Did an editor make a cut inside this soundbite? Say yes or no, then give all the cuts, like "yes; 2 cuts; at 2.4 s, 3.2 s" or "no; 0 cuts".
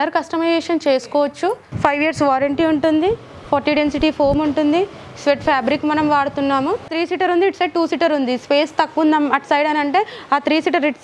yes; 2 cuts; at 1.7 s, 6.9 s